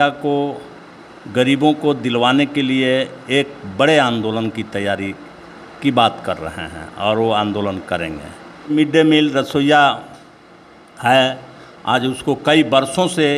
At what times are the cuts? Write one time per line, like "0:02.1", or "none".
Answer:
0:08.7